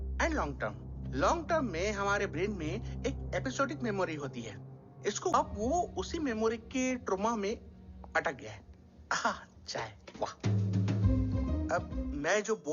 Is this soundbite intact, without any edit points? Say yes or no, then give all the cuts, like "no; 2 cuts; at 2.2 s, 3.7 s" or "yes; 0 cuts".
no; 1 cut; at 5.3 s